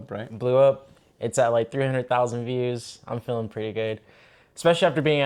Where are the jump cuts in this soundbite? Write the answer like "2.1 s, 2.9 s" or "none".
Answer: none